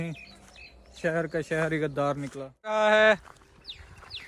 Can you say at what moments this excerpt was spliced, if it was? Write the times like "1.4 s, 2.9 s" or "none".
2.7 s